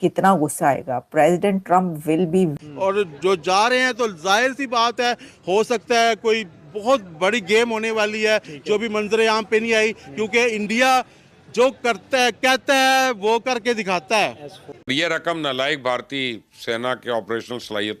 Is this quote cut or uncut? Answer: cut